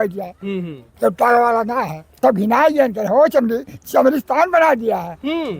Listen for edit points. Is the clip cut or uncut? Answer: cut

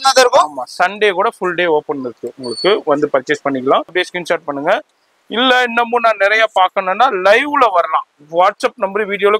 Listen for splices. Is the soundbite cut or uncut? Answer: cut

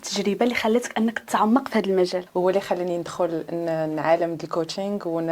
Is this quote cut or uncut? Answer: cut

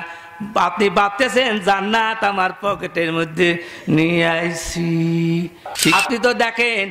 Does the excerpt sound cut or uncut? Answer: cut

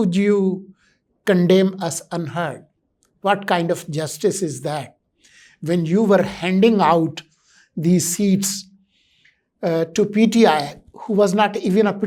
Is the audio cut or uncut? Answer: uncut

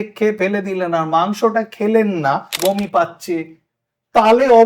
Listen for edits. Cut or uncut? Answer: cut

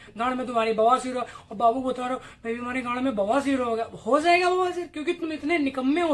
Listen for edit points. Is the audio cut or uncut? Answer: uncut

